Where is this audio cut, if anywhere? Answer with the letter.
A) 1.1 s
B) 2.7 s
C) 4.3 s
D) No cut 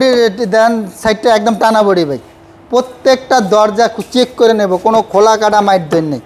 D